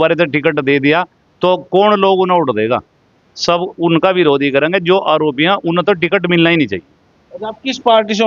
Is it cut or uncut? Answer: uncut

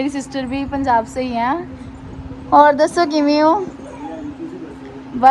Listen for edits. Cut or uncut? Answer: uncut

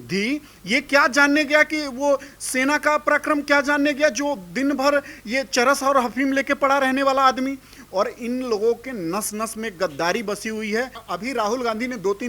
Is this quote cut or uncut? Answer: cut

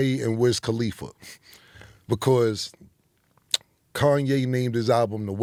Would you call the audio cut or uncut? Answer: uncut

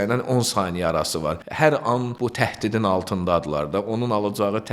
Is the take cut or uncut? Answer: cut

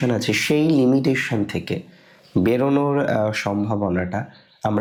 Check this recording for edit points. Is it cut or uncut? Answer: uncut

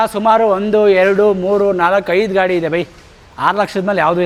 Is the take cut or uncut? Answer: uncut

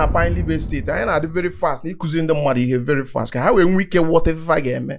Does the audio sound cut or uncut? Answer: uncut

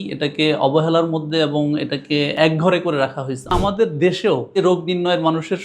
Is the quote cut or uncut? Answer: cut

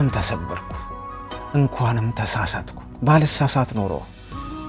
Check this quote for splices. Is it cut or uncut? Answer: uncut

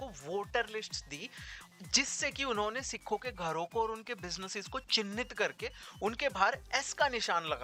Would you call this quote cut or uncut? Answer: uncut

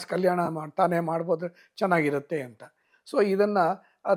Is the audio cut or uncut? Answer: uncut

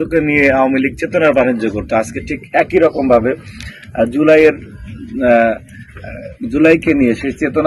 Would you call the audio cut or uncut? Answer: uncut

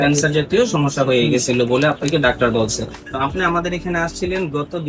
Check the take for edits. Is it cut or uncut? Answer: cut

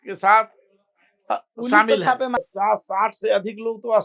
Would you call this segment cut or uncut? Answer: cut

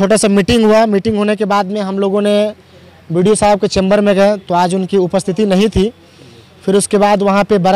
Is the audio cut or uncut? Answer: uncut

